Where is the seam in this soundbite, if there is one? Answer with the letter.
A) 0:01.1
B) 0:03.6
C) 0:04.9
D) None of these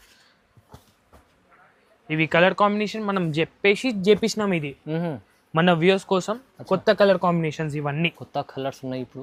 D